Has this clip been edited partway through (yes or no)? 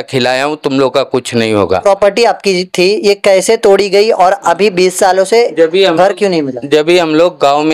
yes